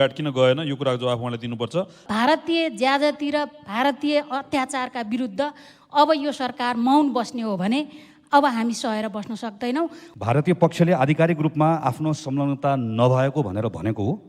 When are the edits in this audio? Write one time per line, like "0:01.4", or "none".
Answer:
0:02.0
0:10.1